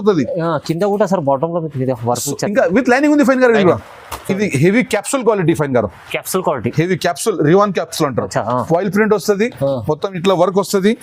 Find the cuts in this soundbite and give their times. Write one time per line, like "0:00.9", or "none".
0:03.9